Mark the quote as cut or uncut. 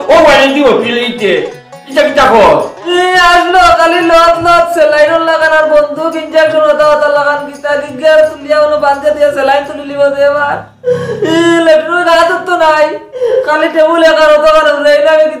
uncut